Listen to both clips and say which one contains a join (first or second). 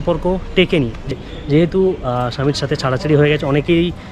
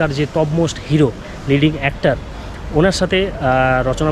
first